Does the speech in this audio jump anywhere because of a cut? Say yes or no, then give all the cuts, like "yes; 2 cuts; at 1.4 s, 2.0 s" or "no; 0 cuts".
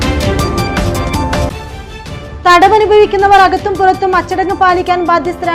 yes; 1 cut; at 1.4 s